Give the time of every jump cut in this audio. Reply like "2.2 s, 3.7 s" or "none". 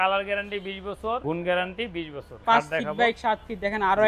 1.2 s, 2.4 s